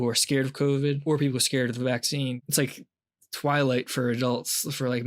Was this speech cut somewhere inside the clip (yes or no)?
yes